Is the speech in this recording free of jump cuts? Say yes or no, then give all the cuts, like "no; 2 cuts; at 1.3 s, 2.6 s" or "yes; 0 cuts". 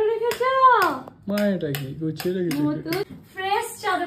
no; 1 cut; at 3.0 s